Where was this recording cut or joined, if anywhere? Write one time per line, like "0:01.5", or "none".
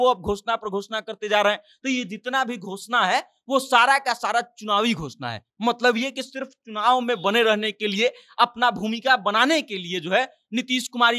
none